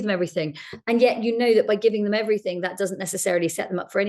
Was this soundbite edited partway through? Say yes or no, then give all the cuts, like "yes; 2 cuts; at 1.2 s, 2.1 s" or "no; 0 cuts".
no; 0 cuts